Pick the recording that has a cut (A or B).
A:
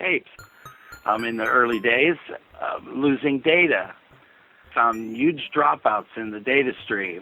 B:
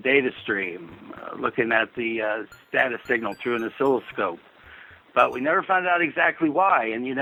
A